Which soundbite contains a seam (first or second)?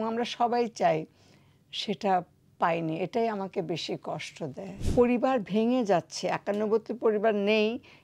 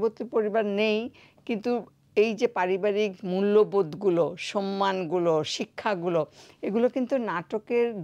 first